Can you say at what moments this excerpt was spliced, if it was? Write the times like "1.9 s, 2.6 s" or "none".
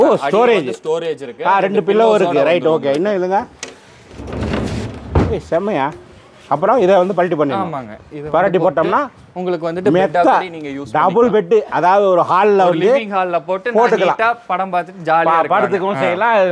none